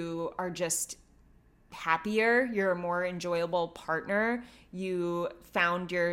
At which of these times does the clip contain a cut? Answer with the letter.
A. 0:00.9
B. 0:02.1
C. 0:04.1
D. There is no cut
D